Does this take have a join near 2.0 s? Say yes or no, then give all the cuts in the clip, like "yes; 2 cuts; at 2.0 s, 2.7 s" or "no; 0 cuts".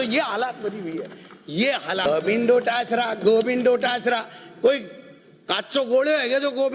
yes; 1 cut; at 2.0 s